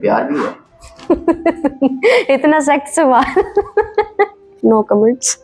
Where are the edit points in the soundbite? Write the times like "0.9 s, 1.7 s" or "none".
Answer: 4.4 s